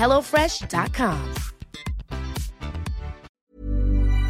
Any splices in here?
yes; 1 cut; at 3.3 s

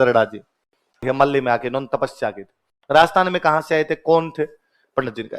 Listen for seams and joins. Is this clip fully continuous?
no; 1 cut; at 1.0 s

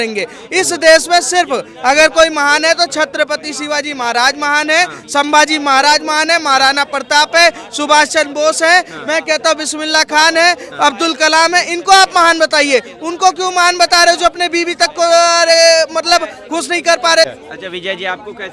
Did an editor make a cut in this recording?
yes; 1 cut; at 17.3 s

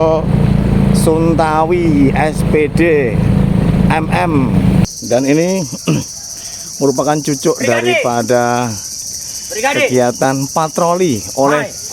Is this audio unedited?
no; 1 cut; at 4.9 s

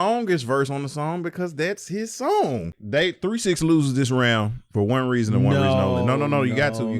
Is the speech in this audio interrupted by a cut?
yes; 1 cut; at 2.8 s

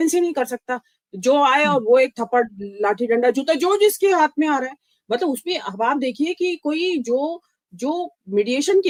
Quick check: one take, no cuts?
yes; 0 cuts

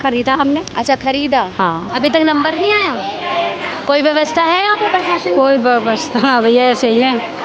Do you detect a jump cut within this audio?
yes; 1 cut; at 1.8 s

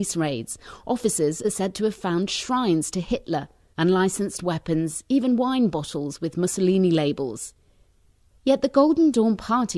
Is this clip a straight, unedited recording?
no; 1 cut; at 2.3 s

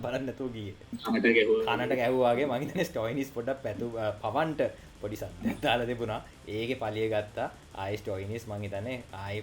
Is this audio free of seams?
no; 2 cuts; at 1.0 s, 6.3 s

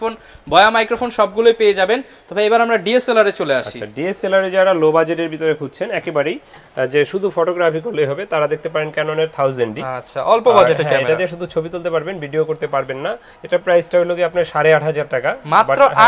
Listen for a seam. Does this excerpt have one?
no; 0 cuts

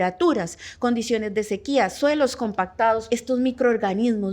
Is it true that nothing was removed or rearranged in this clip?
no; 1 cut; at 3.1 s

